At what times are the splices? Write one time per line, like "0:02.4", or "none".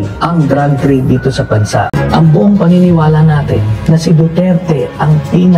0:01.9